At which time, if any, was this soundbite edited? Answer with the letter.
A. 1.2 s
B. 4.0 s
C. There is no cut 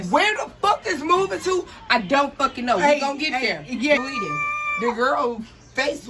B